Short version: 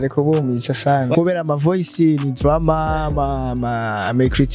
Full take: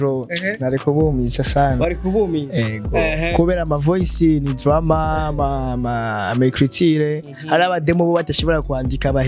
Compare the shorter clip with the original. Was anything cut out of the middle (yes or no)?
yes